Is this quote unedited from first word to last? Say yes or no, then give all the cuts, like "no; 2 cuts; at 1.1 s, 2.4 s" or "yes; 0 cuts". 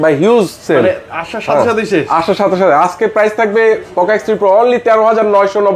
yes; 0 cuts